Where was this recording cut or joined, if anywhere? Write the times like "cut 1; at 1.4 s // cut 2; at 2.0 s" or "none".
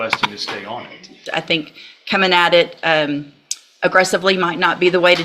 cut 1; at 1.2 s